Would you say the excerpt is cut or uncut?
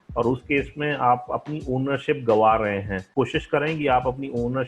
cut